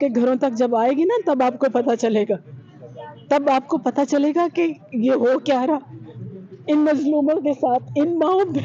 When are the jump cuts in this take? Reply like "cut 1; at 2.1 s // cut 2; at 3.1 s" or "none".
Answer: none

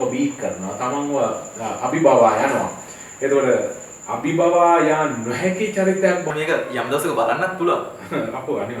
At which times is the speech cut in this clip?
cut 1; at 6.3 s

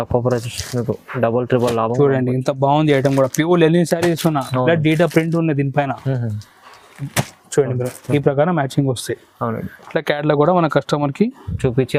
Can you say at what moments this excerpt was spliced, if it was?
none

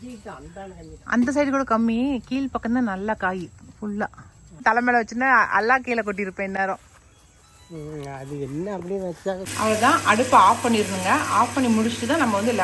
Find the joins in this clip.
cut 1; at 4.6 s // cut 2; at 9.5 s

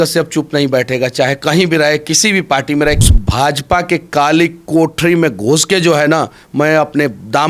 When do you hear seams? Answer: cut 1; at 3.1 s

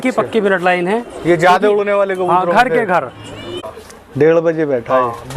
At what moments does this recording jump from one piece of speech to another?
cut 1; at 3.6 s

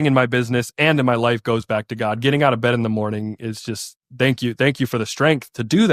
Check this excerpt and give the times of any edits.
none

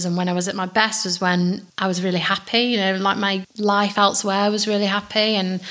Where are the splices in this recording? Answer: cut 1; at 1.7 s // cut 2; at 3.5 s

